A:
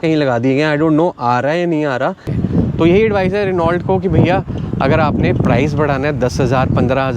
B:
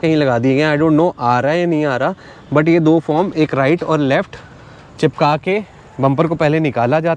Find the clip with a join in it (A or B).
A